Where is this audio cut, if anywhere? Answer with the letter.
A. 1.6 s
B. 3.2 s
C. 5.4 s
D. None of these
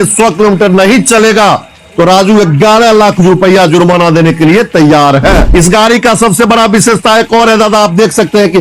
C